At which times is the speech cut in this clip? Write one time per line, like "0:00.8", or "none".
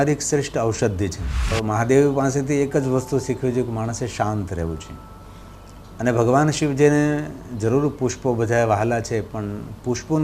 0:01.5